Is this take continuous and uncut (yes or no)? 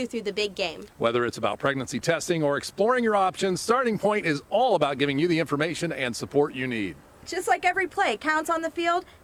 yes